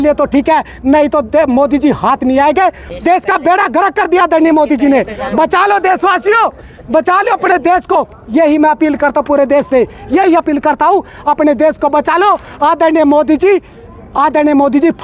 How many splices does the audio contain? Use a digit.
1